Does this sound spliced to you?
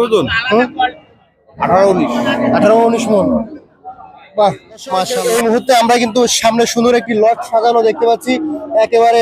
yes; 1 cut; at 5.1 s

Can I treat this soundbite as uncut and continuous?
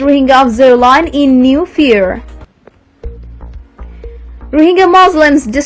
no; 2 cuts; at 2.3 s, 3.9 s

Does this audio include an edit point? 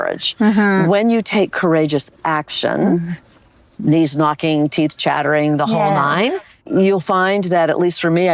yes; 1 cut; at 6.6 s

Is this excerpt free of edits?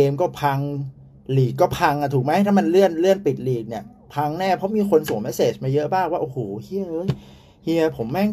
yes; 0 cuts

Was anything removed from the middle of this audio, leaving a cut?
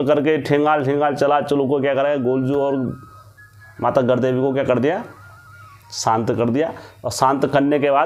no; 0 cuts

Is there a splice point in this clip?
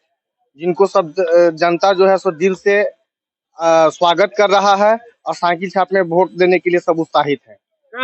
no; 0 cuts

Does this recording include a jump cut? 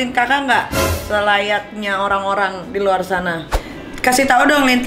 yes; 1 cut; at 3.5 s

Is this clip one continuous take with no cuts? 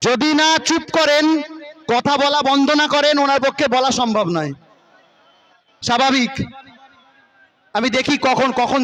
yes; 0 cuts

